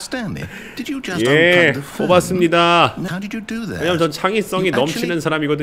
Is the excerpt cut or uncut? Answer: cut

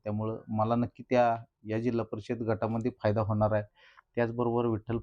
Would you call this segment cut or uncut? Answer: uncut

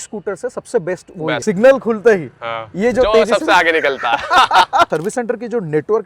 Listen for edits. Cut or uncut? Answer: cut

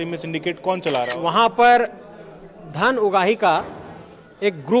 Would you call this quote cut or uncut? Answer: cut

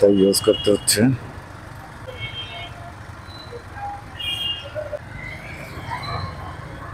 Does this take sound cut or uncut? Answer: cut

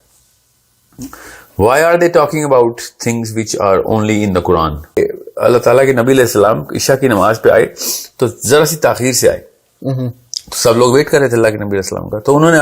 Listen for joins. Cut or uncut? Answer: cut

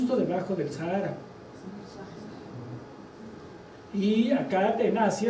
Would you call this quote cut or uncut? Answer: cut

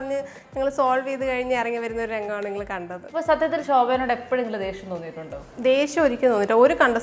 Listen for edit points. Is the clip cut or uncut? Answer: cut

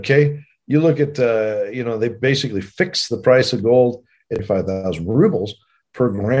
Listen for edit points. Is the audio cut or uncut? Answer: cut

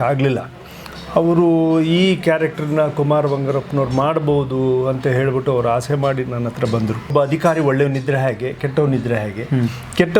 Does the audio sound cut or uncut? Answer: cut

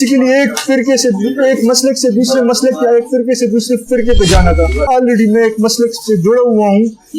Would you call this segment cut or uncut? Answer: cut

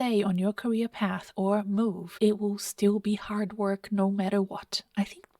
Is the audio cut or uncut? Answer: cut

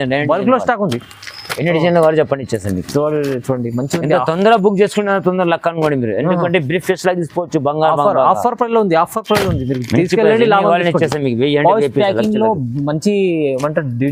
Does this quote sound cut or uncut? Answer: uncut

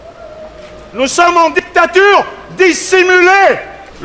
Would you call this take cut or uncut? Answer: cut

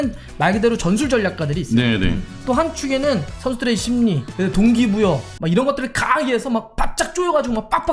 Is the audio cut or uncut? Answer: cut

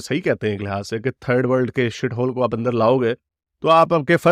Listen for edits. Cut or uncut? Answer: uncut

